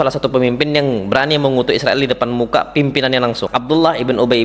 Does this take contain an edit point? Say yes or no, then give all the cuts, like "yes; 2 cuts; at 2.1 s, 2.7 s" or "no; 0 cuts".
yes; 1 cut; at 3.4 s